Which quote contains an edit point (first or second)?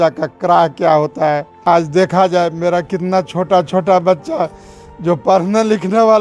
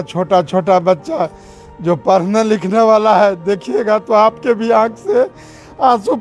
first